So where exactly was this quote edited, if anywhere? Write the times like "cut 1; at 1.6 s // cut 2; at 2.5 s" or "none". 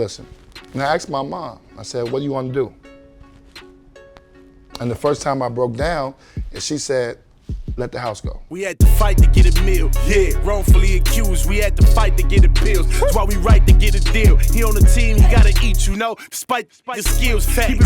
cut 1; at 8.4 s